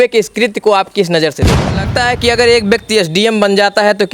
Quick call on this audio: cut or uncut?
cut